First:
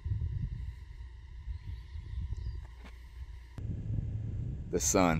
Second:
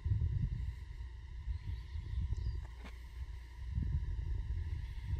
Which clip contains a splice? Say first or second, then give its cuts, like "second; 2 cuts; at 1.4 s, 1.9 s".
first; 1 cut; at 3.6 s